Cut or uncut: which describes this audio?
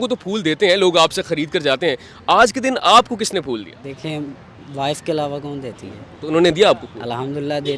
cut